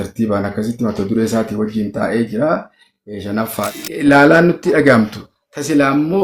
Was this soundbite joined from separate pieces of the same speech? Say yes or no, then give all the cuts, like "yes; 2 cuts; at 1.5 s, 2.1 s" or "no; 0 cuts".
yes; 1 cut; at 3.8 s